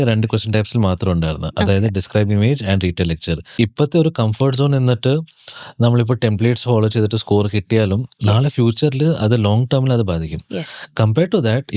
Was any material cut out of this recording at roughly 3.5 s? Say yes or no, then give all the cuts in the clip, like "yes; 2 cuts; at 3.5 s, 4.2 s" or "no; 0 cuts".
yes; 1 cut; at 3.5 s